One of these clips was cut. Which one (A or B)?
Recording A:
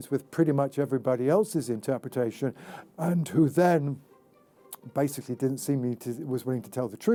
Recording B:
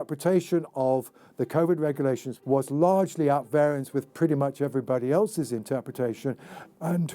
B